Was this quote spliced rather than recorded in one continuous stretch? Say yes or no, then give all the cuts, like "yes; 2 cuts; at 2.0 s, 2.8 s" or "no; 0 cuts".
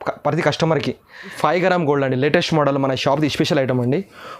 yes; 1 cut; at 1.3 s